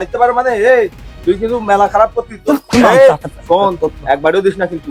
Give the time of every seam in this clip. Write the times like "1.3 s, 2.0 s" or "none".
none